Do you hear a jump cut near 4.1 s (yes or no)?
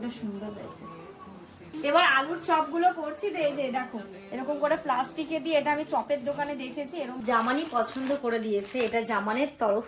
no